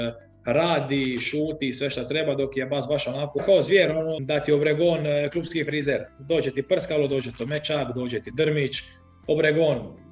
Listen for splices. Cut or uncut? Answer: cut